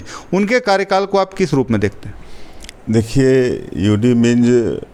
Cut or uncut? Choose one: uncut